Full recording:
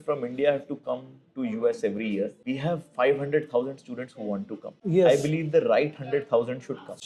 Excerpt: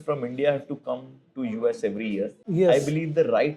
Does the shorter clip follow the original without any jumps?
no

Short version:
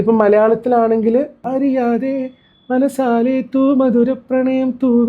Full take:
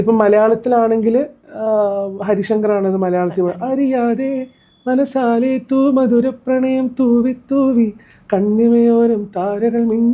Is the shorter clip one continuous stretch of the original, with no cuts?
no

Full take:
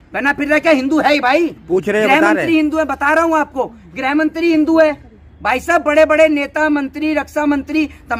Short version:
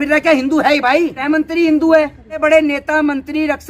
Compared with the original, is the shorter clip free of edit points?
no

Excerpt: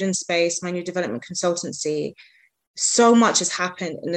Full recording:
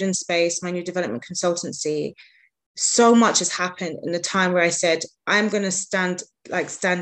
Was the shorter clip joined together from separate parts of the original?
no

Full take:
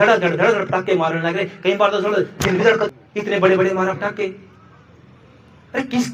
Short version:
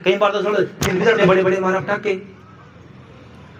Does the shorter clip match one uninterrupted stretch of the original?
no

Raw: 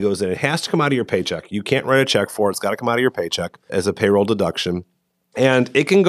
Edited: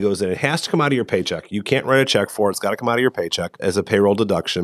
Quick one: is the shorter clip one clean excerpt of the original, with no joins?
no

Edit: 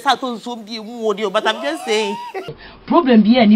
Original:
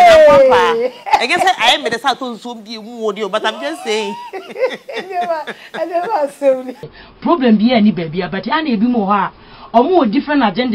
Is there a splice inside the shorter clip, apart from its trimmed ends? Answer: yes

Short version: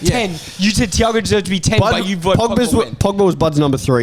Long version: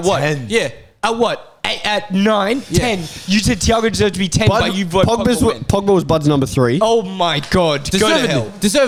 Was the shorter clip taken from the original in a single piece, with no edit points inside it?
yes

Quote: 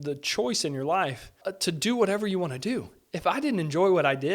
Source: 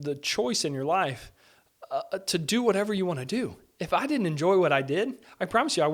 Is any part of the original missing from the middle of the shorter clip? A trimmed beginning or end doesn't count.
yes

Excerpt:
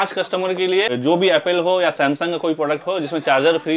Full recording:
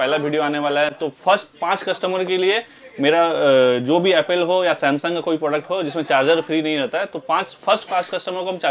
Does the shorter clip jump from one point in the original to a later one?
yes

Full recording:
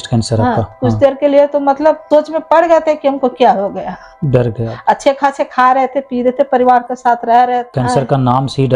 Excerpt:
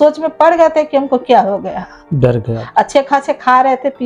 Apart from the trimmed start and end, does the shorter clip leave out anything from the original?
no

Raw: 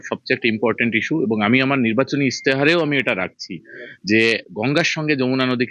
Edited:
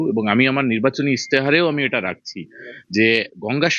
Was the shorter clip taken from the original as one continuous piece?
yes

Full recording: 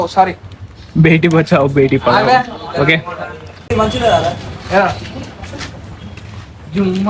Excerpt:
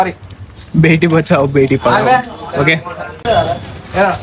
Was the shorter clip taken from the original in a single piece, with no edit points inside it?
no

